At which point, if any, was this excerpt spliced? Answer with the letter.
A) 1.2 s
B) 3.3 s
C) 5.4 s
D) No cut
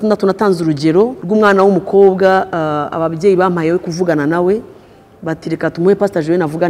A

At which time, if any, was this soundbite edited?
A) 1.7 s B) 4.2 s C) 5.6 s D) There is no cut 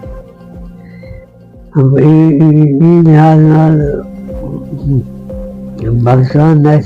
A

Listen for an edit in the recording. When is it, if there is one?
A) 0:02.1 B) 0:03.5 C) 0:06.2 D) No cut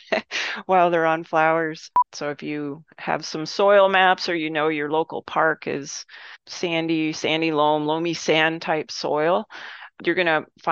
A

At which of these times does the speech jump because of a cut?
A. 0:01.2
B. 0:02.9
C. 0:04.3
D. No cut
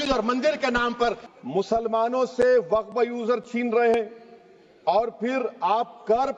A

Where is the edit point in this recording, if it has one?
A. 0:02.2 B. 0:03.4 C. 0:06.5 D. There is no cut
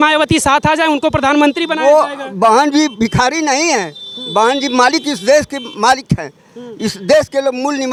D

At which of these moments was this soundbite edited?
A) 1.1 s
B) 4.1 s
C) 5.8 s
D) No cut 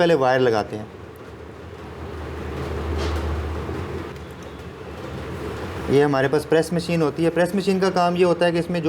B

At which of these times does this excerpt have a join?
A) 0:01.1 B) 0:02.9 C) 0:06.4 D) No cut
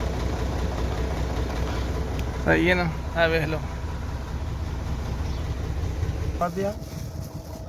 C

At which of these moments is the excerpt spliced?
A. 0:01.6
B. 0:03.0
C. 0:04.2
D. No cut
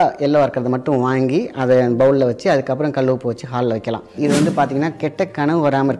C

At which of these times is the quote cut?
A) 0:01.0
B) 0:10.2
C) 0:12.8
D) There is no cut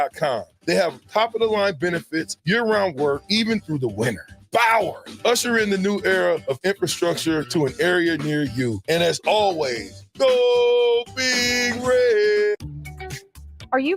C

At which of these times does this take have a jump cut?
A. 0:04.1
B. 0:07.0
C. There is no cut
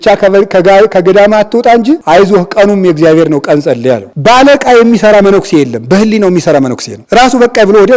A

